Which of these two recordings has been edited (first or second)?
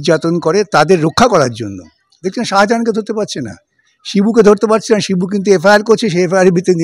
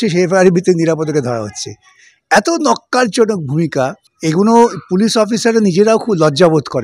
second